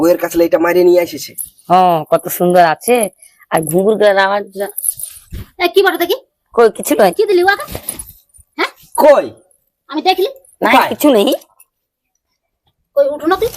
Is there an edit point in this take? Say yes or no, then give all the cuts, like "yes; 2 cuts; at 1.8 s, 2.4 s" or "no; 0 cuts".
yes; 1 cut; at 1.8 s